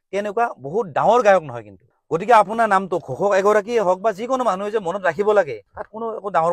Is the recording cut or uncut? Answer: uncut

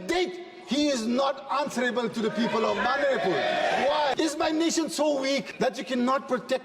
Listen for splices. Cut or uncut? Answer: cut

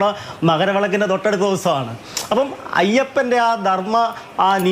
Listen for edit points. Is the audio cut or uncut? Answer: uncut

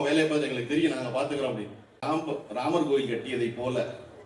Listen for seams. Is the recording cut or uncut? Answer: cut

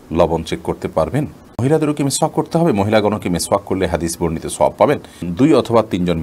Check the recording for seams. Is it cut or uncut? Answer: cut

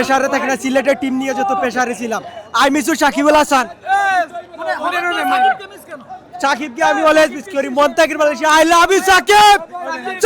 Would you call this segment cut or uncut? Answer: uncut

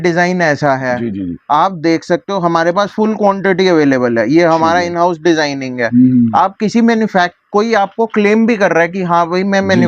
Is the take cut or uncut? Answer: uncut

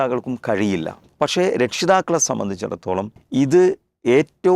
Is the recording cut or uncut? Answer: cut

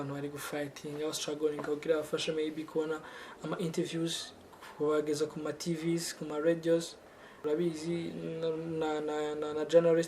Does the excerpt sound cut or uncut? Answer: uncut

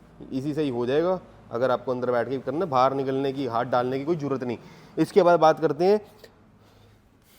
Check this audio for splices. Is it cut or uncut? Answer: uncut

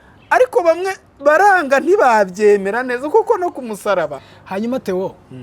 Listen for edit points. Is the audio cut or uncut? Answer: cut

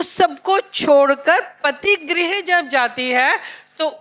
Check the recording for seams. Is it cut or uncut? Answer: uncut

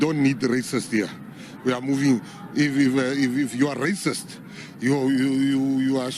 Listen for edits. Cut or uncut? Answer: cut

